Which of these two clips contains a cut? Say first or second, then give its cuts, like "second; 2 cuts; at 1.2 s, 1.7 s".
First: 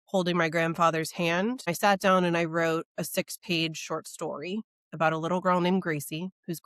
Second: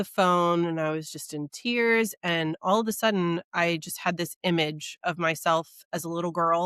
first; 1 cut; at 1.7 s